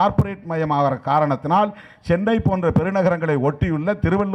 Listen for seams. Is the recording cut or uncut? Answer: uncut